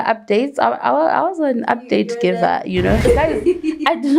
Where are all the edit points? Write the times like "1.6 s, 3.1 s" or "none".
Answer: 3.0 s